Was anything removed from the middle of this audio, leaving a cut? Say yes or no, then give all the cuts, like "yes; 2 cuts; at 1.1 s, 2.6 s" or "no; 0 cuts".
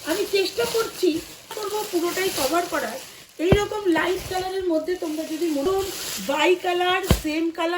yes; 2 cuts; at 1.5 s, 5.6 s